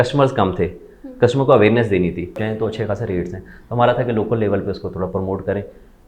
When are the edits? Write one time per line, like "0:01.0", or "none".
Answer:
0:02.4